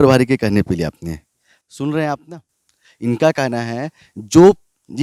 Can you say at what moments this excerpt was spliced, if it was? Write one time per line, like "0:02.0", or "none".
none